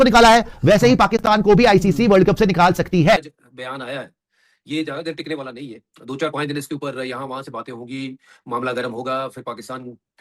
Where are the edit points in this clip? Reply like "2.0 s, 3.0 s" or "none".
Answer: 3.2 s